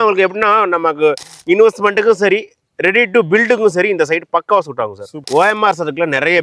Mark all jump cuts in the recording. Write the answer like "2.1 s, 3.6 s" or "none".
5.2 s